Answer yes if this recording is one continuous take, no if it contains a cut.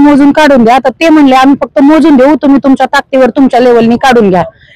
yes